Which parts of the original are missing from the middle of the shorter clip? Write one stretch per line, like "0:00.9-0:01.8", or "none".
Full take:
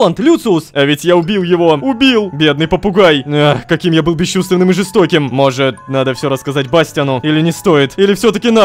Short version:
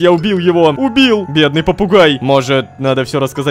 0:03.2-0:05.3